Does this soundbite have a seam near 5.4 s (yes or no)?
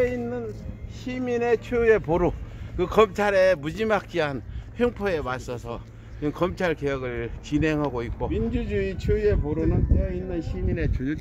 no